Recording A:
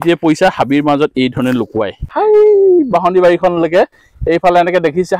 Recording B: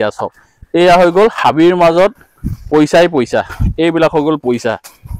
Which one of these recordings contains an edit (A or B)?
A